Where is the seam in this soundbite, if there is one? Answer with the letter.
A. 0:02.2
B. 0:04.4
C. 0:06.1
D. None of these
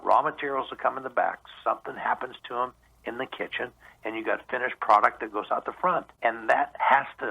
C